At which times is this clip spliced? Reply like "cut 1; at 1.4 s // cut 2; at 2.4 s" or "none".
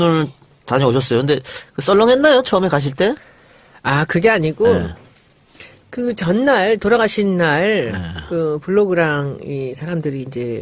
none

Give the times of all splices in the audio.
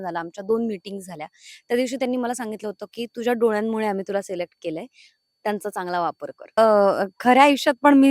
cut 1; at 6.6 s

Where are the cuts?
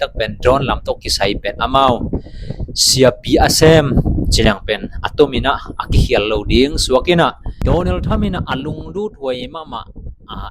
cut 1; at 7.5 s

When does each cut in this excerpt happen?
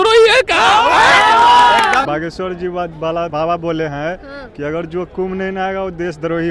cut 1; at 2.0 s // cut 2; at 3.3 s

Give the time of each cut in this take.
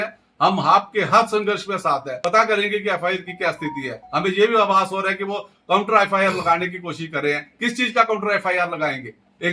cut 1; at 2.1 s

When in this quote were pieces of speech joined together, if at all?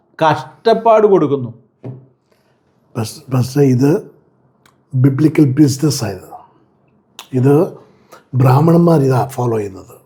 none

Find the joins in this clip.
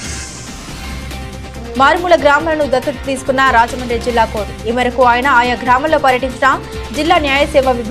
cut 1; at 1.4 s

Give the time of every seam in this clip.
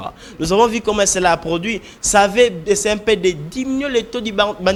none

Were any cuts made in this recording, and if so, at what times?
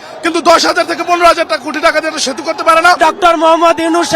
cut 1; at 3.0 s

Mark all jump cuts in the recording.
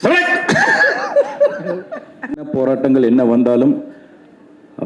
cut 1; at 2.5 s

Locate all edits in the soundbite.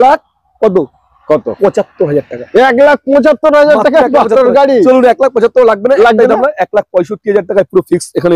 none

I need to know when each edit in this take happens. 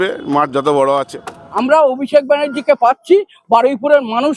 cut 1; at 1.6 s

